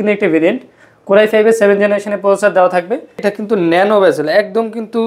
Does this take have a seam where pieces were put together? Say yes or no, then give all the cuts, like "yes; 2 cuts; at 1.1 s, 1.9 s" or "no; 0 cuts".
yes; 1 cut; at 3.2 s